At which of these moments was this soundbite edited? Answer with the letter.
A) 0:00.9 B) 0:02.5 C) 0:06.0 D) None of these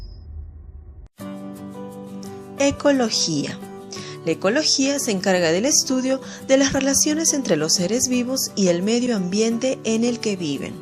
A